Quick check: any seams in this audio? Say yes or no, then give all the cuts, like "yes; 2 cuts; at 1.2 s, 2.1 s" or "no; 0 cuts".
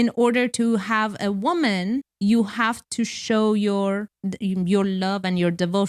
yes; 2 cuts; at 2.1 s, 4.1 s